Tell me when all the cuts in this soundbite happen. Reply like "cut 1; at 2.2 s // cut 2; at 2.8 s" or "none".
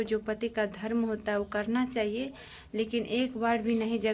none